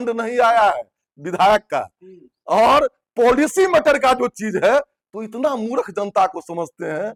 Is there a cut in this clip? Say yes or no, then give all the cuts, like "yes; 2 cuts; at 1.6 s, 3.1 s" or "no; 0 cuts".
no; 0 cuts